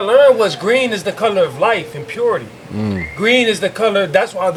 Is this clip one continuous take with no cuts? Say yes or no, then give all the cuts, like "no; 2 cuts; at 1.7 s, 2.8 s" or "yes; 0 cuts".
yes; 0 cuts